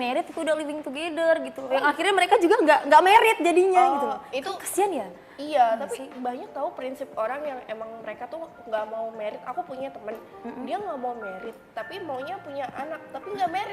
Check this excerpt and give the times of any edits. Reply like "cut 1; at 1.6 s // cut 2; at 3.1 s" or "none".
none